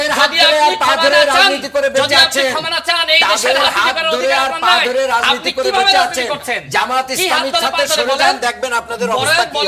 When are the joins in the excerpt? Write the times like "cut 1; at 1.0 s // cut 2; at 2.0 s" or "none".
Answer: none